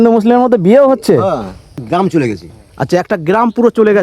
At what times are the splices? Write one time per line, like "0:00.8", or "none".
0:01.7